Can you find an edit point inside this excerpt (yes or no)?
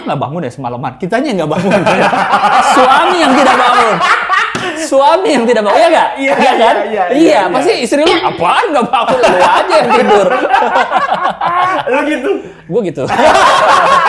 no